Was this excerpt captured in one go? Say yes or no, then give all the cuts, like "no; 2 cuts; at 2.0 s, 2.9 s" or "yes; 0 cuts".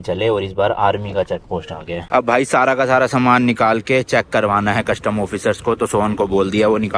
no; 1 cut; at 2.0 s